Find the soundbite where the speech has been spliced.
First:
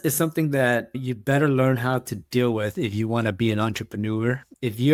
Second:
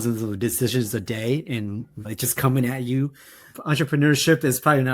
second; 1 cut; at 3.5 s

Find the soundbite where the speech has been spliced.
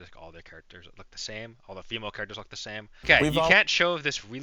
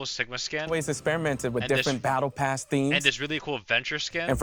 first; 1 cut; at 3.0 s

